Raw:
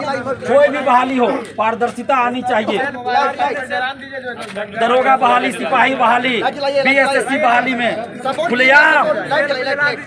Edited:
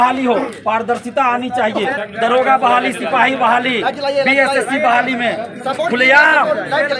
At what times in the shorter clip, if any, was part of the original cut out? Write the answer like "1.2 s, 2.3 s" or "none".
2.0 s

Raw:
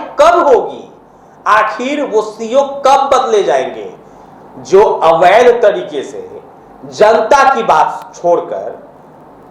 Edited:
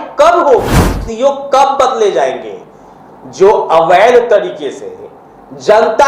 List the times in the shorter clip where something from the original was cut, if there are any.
1.0 s

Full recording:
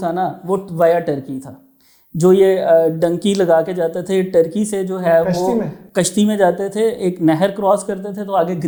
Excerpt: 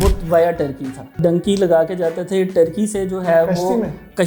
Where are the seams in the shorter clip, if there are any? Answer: 1.2 s

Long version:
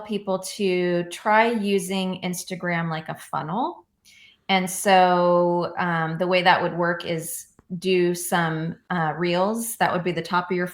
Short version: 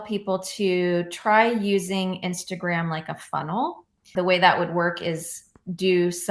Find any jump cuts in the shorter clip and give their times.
4.1 s

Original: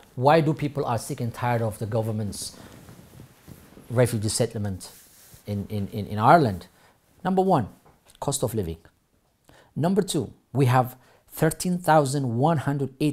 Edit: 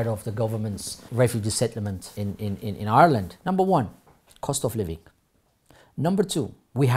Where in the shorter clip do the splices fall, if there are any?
0.9 s, 2.0 s, 3.3 s

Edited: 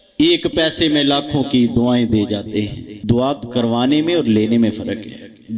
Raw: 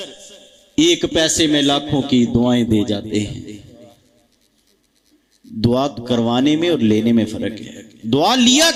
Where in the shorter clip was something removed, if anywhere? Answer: 2.9 s

